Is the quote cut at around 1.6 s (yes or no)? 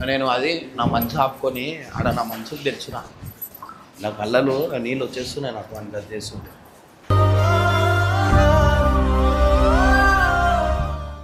no